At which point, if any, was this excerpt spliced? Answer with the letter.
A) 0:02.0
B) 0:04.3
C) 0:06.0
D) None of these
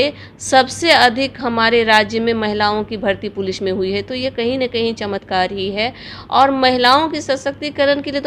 D